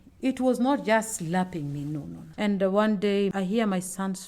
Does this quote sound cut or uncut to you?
cut